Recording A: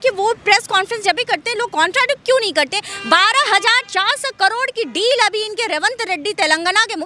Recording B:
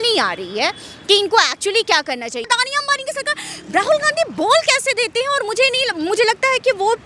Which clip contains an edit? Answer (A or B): B